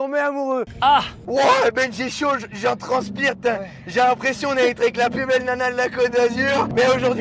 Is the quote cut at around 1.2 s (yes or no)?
yes